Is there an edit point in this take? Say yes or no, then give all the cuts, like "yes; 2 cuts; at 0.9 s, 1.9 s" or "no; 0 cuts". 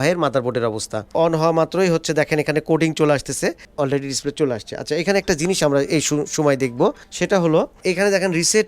yes; 1 cut; at 1.1 s